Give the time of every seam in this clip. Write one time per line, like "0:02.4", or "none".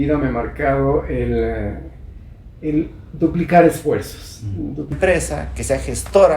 0:04.9